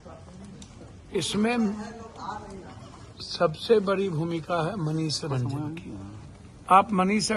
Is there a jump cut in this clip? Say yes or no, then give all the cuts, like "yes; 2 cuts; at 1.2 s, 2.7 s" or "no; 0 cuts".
yes; 1 cut; at 6.3 s